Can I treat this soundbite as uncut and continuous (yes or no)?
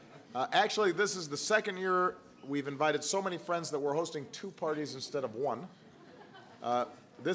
no